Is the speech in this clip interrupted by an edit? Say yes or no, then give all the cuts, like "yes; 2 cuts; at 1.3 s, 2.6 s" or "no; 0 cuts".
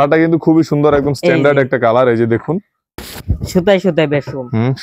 yes; 1 cut; at 2.9 s